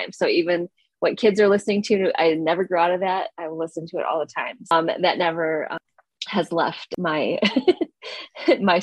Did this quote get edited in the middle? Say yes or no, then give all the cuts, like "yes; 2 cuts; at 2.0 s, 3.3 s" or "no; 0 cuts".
yes; 3 cuts; at 4.7 s, 5.8 s, 6.9 s